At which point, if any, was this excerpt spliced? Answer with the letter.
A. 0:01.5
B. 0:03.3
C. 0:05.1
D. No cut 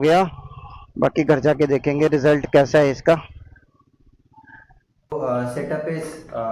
C